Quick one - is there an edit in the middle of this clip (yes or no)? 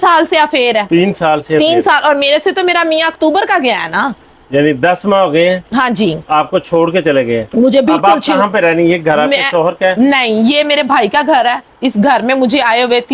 no